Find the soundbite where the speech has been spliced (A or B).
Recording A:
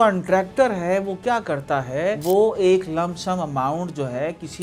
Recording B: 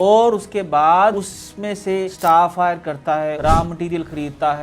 B